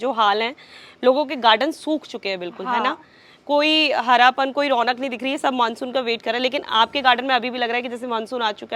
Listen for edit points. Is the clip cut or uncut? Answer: uncut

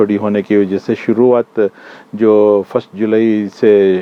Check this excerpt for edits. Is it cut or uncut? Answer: uncut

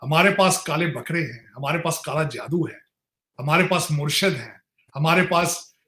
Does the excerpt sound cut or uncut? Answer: uncut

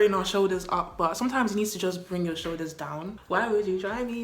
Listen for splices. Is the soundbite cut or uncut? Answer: cut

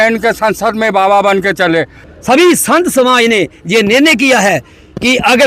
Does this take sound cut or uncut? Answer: cut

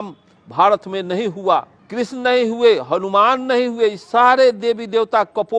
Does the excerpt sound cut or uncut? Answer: cut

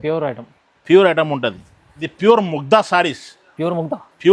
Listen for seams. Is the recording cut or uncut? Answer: cut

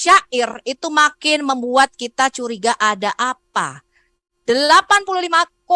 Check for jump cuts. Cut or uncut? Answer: cut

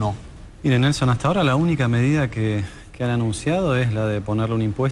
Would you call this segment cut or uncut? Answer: cut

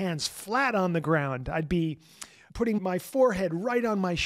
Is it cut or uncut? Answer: cut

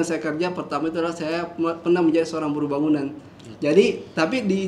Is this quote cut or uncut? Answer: uncut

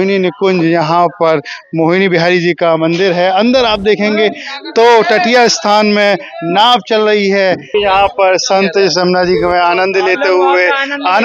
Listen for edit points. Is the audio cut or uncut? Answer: cut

